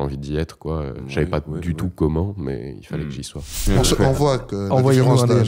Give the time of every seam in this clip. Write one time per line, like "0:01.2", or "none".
0:03.5